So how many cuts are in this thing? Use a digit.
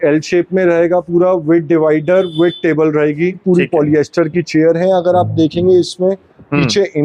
1